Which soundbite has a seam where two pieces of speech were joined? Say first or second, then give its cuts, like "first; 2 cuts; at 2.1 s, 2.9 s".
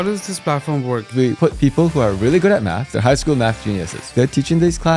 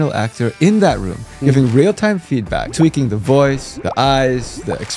first; 3 cuts; at 1.1 s, 2.8 s, 4.0 s